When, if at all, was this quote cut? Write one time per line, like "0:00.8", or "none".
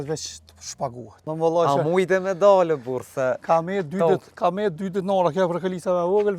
0:01.2